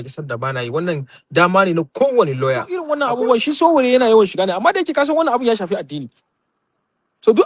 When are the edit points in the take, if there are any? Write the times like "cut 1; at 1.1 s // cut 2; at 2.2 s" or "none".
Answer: cut 1; at 2.9 s